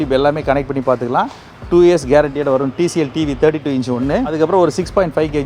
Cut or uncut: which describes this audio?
cut